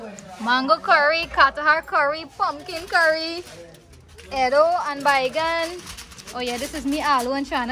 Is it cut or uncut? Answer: uncut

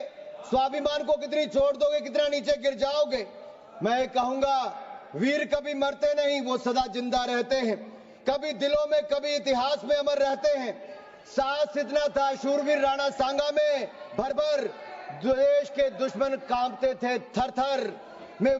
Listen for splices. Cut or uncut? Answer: uncut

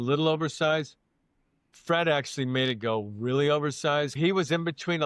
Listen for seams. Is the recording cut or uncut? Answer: cut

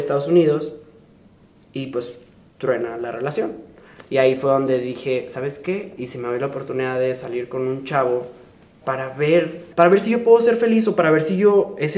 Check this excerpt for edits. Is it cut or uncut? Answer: cut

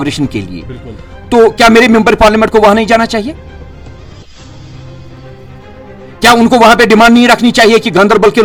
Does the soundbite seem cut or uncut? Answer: uncut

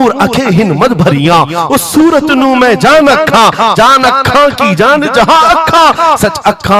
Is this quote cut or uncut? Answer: uncut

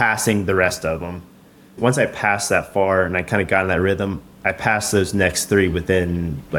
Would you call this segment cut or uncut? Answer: cut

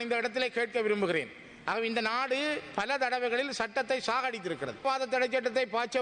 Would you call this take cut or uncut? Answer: cut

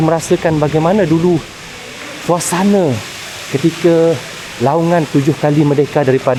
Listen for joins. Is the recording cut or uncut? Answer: uncut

